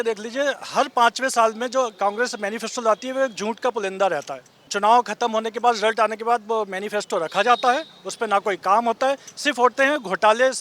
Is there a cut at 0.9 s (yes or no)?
no